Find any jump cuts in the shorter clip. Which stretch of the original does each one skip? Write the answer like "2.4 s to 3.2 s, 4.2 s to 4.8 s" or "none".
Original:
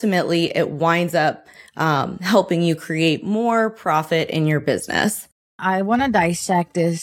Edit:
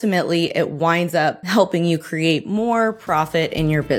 1.4 s to 2.2 s